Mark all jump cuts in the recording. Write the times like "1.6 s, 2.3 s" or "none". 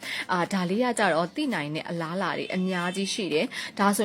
none